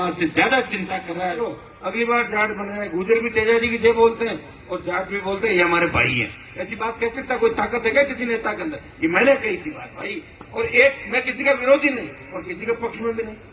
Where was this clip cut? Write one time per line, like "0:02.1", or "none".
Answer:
0:01.6